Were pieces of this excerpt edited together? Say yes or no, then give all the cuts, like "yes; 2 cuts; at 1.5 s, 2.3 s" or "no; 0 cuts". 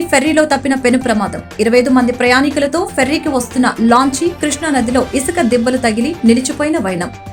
no; 0 cuts